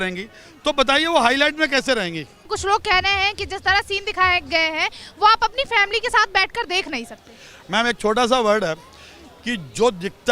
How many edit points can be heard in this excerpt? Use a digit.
1